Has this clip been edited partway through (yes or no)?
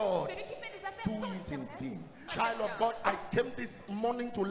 yes